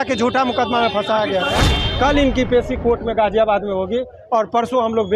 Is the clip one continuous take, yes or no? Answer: no